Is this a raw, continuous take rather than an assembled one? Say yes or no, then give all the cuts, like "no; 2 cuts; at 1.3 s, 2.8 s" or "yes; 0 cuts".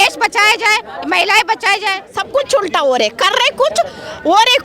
no; 1 cut; at 2.1 s